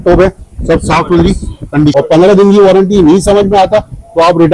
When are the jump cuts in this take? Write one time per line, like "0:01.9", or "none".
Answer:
0:01.9